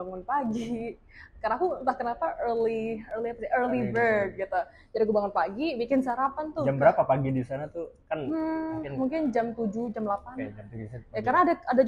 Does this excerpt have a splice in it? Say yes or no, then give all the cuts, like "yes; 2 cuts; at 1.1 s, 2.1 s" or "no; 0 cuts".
no; 0 cuts